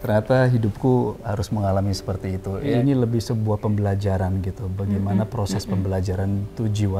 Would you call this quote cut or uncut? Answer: cut